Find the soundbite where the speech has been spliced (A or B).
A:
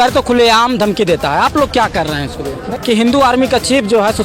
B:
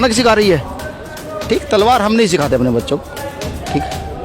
A